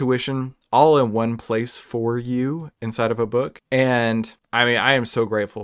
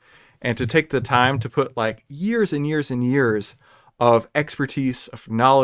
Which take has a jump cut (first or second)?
first